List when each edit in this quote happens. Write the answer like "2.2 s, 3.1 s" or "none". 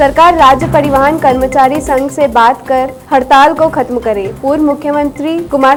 none